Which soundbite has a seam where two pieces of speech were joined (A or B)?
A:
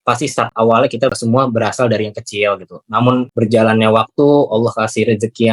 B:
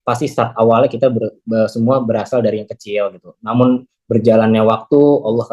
A